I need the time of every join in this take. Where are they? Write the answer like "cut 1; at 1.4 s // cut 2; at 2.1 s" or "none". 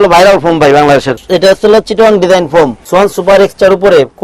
cut 1; at 1.1 s // cut 2; at 2.8 s